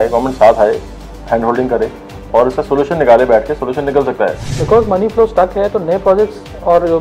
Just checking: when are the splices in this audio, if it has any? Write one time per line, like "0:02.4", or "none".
0:04.5

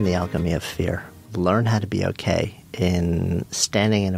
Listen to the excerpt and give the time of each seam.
0:01.2
0:02.6

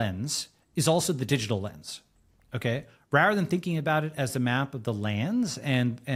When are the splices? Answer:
none

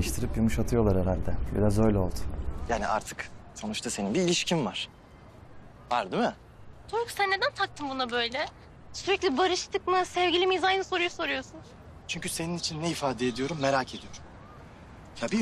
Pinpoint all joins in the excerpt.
none

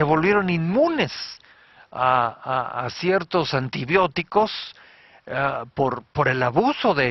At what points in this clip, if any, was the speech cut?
0:02.9

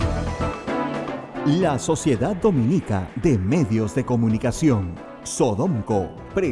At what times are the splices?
0:01.3

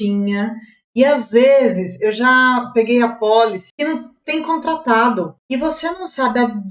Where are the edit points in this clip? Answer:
0:03.6
0:05.4

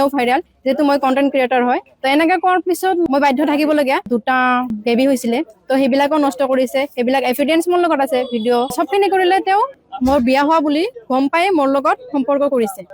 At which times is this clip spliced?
none

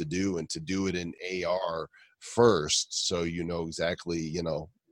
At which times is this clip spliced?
0:01.1

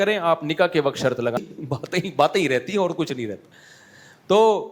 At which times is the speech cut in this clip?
0:01.4

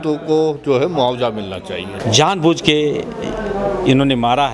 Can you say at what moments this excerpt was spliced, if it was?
0:01.9

